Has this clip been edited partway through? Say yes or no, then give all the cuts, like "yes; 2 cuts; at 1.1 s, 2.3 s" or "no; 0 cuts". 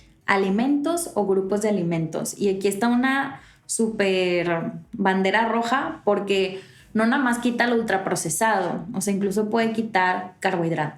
no; 0 cuts